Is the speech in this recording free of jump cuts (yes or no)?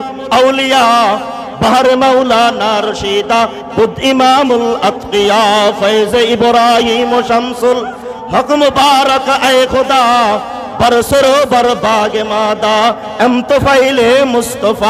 yes